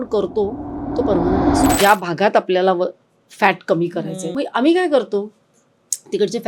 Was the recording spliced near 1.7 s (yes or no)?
yes